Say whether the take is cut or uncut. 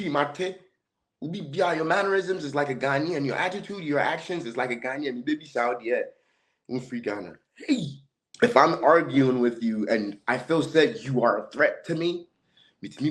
cut